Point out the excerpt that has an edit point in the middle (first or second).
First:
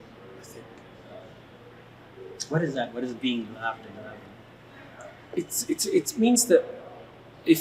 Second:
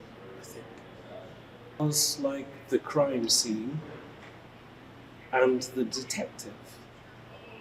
second